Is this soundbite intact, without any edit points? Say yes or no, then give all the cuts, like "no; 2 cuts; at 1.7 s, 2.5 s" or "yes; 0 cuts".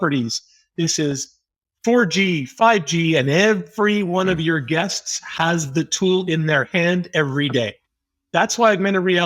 yes; 0 cuts